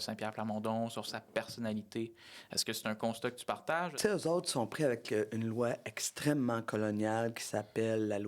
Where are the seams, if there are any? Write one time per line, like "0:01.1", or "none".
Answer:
0:03.9